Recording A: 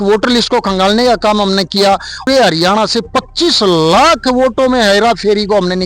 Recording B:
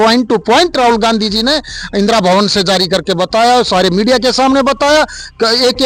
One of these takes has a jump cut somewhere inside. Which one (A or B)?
A